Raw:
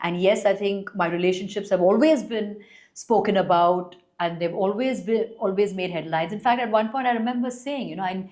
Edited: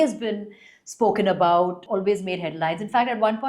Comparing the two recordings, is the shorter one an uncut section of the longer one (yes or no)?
no